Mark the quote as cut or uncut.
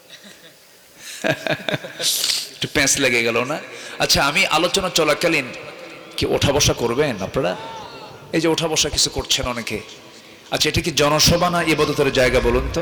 uncut